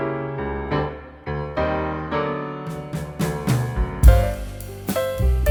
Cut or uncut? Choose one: uncut